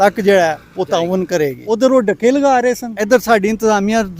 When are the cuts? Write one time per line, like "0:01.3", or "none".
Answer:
0:01.6
0:02.9